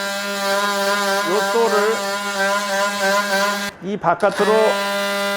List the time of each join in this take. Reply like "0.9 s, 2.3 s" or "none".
3.7 s